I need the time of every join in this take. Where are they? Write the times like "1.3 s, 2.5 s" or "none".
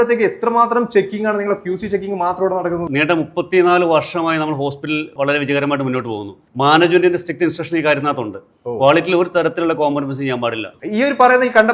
2.8 s, 5.1 s, 6.4 s, 10.7 s